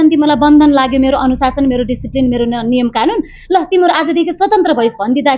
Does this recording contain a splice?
no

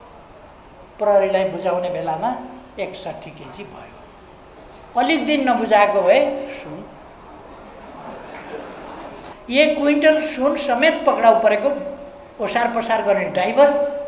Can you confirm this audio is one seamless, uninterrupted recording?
no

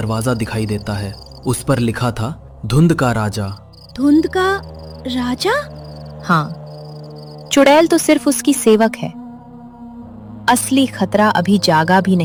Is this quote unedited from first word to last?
yes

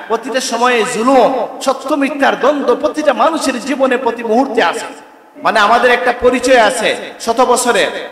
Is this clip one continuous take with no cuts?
no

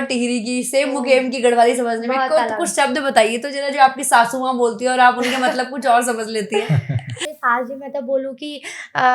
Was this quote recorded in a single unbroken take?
no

